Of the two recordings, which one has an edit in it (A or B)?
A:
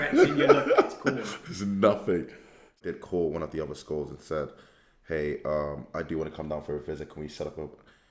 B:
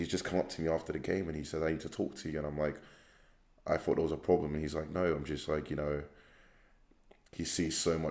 A